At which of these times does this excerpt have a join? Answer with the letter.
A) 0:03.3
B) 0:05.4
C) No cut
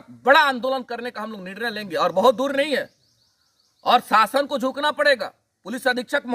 C